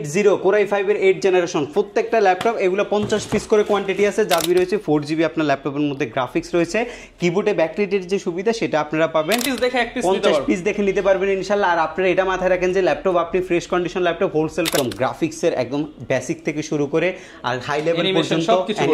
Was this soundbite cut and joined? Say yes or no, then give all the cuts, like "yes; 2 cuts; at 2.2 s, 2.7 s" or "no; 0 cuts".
yes; 3 cuts; at 4.4 s, 9.5 s, 14.7 s